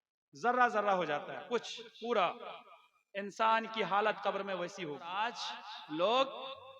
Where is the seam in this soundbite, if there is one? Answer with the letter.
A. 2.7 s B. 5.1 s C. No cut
B